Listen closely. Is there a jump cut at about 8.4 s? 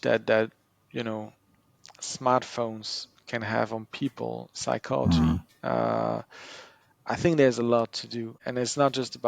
yes; 1 cut; at 8.4 s

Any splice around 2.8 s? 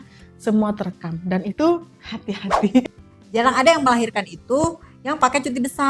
yes; 1 cut; at 2.8 s

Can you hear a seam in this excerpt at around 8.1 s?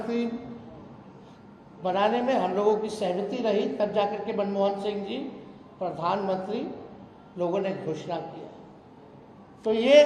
no; 0 cuts

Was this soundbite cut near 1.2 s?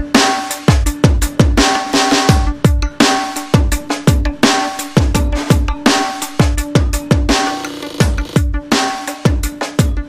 no; 1 cut; at 9.1 s

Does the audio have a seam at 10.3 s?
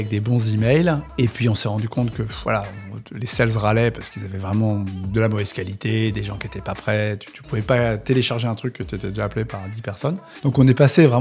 yes; 2 cuts; at 1.1 s, 10.3 s

